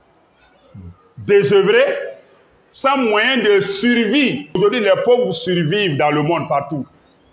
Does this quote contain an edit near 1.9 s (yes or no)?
no